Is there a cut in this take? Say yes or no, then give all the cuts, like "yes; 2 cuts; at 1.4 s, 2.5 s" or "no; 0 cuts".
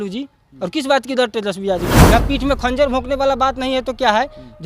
yes; 1 cut; at 1.9 s